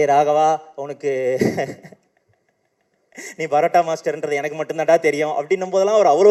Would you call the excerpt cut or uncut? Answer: uncut